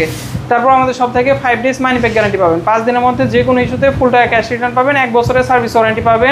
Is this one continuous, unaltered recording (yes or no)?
yes